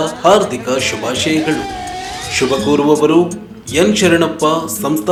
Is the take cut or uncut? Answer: uncut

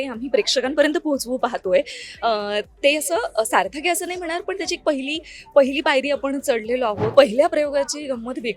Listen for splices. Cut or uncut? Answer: cut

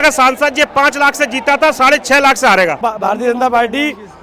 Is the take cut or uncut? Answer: cut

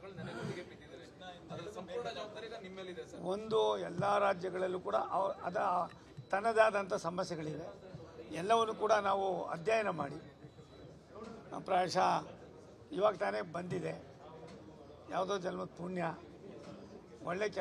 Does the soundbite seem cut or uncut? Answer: uncut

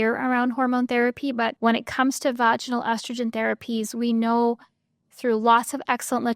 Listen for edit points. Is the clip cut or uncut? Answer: cut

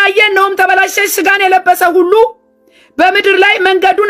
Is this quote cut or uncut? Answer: uncut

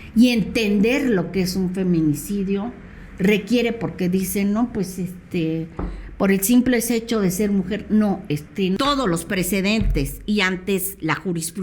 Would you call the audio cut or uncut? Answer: cut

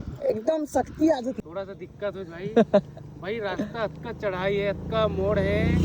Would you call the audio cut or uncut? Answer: cut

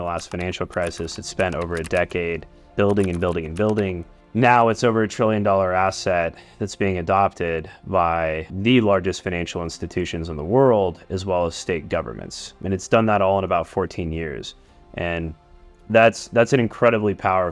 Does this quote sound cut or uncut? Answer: cut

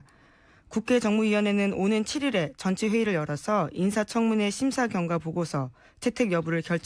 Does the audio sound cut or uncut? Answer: uncut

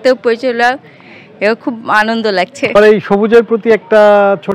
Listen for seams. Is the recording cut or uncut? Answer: cut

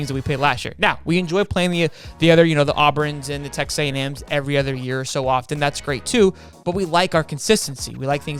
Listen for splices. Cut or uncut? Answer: uncut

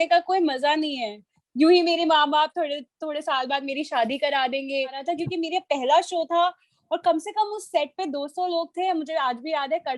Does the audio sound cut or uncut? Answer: cut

